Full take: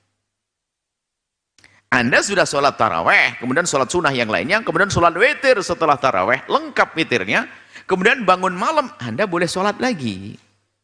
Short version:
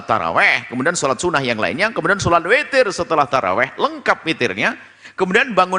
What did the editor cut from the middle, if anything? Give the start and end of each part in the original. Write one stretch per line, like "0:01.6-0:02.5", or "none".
none